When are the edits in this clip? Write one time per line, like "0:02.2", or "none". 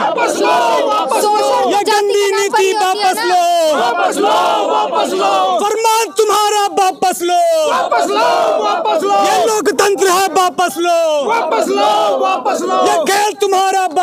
none